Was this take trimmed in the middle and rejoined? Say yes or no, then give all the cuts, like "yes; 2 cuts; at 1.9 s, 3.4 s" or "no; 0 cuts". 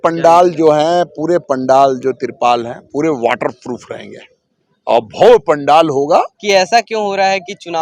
yes; 1 cut; at 6.4 s